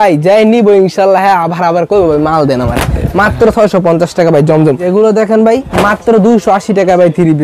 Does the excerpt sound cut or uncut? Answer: cut